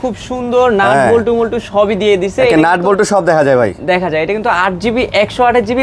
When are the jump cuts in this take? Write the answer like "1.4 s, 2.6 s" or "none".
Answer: none